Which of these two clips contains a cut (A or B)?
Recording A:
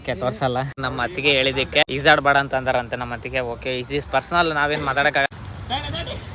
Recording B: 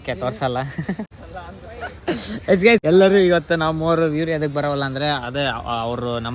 A